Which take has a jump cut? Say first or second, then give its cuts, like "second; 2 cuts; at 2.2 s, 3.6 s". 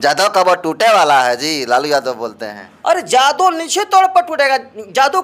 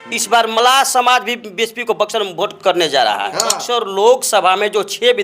second; 1 cut; at 3.6 s